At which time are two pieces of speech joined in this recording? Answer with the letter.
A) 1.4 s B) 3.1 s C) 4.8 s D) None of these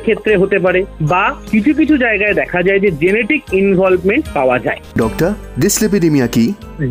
C